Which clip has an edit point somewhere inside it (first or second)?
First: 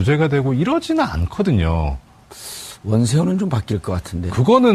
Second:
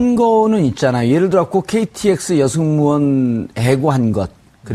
first